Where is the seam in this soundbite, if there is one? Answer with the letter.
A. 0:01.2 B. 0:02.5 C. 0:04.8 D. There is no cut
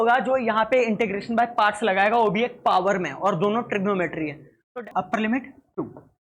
C